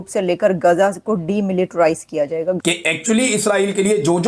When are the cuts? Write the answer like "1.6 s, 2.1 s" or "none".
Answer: 2.6 s

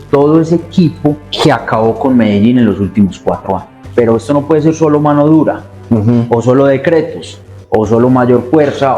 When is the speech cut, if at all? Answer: 1.3 s, 3.7 s

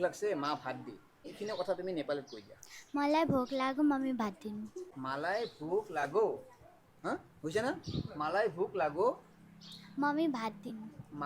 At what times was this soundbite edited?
1.3 s

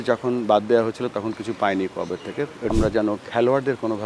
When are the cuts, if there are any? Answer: 2.7 s

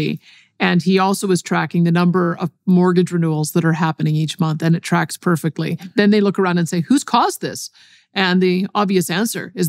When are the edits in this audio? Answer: 5.8 s

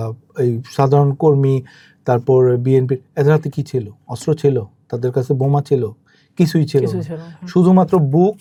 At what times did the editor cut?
none

